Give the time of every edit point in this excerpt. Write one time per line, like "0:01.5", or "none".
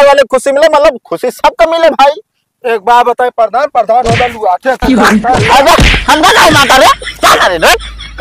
none

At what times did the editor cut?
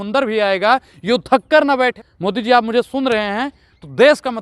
0:02.0

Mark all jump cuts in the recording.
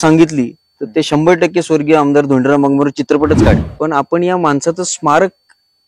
0:03.7

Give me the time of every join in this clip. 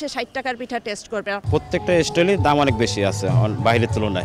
0:01.4

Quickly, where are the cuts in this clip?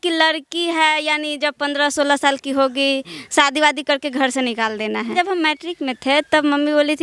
0:05.1

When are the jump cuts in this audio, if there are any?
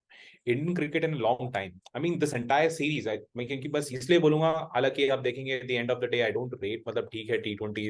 none

